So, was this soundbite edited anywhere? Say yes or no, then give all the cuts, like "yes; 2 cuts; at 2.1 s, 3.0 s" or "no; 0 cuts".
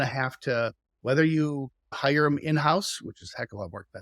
yes; 1 cut; at 2.0 s